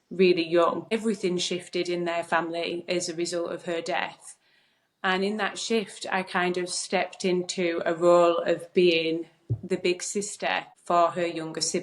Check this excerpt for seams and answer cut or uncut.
cut